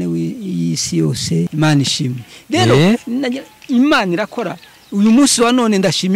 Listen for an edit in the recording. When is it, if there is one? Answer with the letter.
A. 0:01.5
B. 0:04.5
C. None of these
A